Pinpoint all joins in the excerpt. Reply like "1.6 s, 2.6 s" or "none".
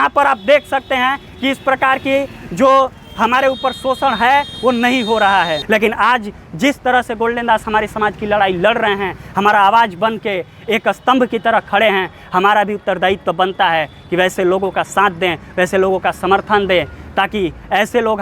5.6 s